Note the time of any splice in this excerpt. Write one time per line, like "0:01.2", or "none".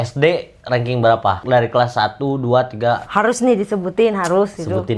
0:01.4